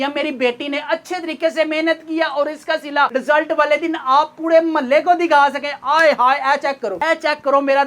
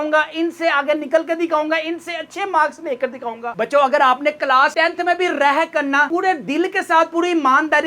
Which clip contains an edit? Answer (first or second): second